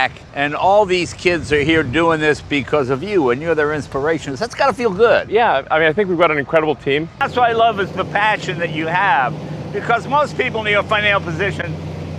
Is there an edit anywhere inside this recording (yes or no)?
yes